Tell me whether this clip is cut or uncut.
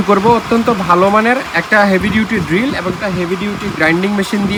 uncut